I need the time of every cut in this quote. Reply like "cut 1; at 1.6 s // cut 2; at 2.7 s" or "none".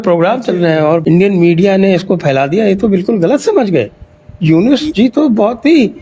cut 1; at 1.0 s